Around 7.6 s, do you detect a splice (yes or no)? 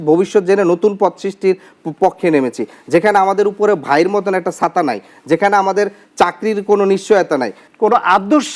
yes